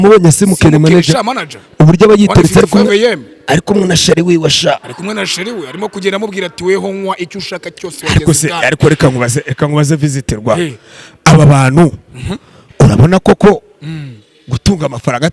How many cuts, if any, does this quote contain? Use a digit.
0